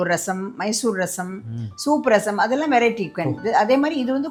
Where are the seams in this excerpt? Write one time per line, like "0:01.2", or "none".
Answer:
none

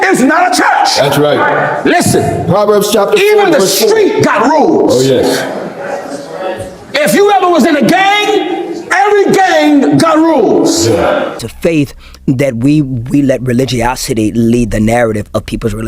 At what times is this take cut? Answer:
0:11.5

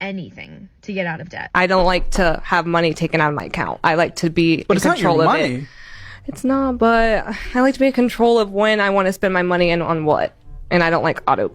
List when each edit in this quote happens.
0:01.3

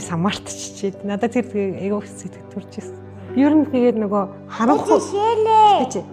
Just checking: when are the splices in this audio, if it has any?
0:03.1

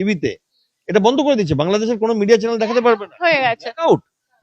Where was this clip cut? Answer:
none

